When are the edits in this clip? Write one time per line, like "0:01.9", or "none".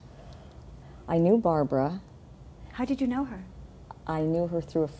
0:04.0